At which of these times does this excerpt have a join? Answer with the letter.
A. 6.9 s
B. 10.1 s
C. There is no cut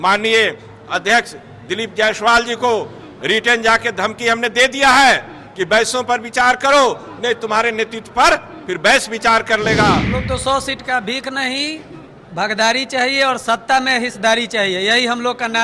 B